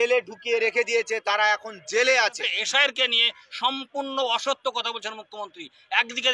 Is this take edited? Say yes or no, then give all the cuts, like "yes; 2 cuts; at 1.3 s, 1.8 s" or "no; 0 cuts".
yes; 1 cut; at 2.5 s